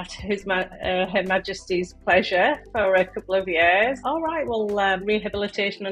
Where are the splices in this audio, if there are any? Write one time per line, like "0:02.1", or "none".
0:04.0
0:05.0